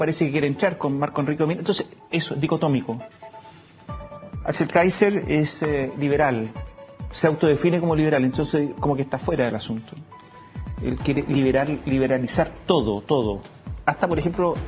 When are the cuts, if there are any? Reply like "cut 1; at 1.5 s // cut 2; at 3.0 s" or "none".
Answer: cut 1; at 9.1 s